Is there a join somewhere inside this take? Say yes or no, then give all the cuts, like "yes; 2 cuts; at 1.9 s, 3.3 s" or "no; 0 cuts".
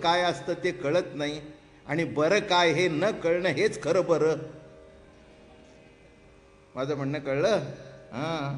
no; 0 cuts